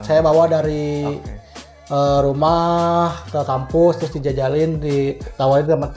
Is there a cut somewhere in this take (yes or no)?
no